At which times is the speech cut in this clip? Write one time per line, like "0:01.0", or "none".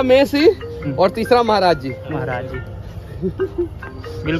none